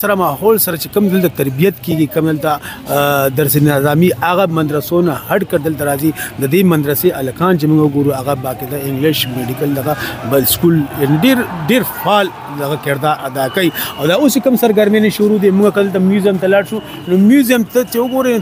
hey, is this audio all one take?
yes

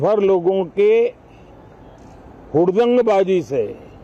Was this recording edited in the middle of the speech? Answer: no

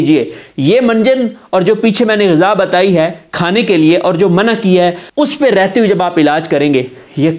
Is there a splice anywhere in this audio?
yes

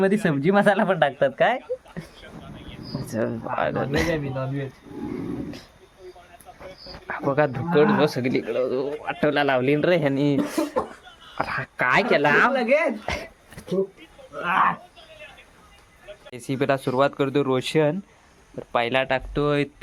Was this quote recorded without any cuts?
yes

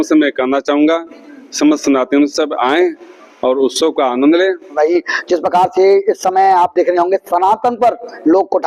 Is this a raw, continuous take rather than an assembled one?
no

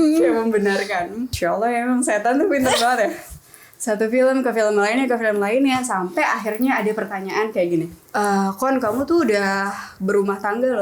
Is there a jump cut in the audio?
yes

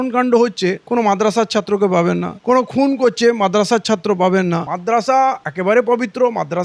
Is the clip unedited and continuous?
no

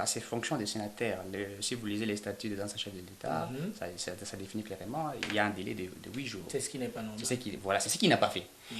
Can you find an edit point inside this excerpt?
no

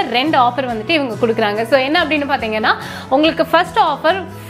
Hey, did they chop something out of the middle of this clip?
no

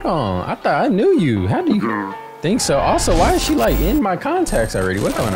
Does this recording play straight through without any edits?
yes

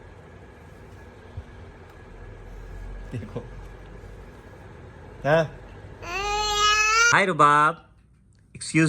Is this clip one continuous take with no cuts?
no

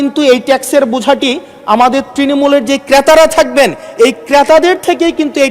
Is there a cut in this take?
no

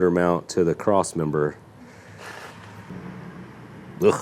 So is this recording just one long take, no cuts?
no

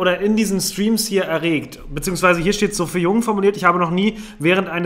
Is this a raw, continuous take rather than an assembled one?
yes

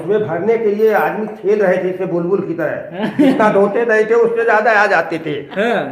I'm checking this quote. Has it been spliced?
no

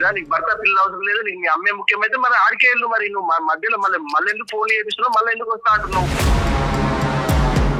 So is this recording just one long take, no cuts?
yes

